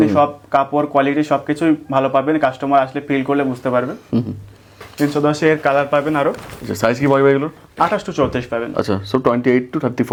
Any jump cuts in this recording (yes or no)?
no